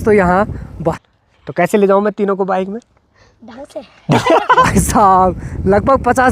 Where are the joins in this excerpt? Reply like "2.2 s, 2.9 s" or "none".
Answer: 1.0 s, 4.7 s